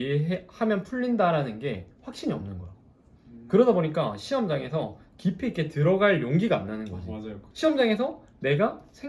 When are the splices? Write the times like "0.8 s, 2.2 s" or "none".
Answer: 7.4 s